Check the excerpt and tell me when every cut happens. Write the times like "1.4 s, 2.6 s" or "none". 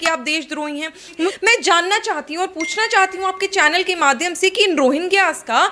1.3 s